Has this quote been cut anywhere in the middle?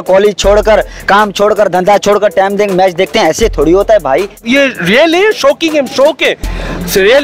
yes; 1 cut; at 4.4 s

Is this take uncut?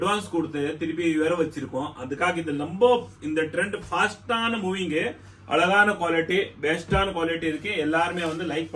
yes; 0 cuts

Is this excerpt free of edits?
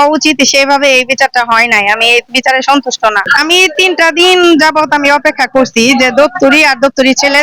no; 1 cut; at 3.2 s

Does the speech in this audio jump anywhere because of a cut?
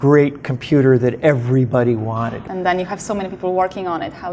yes; 1 cut; at 2.3 s

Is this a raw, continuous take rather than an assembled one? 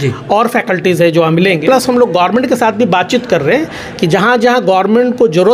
no; 1 cut; at 1.6 s

